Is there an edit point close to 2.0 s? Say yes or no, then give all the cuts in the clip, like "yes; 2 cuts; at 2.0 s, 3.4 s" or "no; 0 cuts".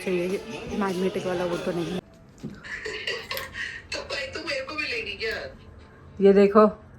yes; 1 cut; at 2.0 s